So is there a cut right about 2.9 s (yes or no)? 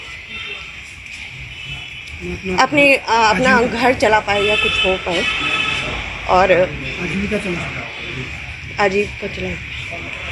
no